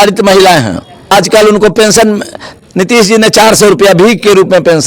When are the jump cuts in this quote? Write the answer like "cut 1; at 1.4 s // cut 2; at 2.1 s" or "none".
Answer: cut 1; at 1.0 s